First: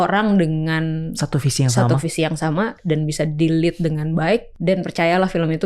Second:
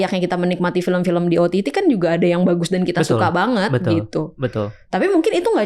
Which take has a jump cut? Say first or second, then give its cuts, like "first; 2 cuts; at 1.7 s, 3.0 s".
first; 1 cut; at 4.5 s